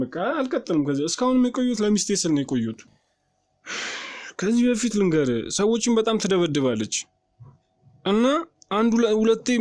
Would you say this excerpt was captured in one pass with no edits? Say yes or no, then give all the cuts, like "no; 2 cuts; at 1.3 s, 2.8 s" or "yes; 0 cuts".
no; 1 cut; at 2.8 s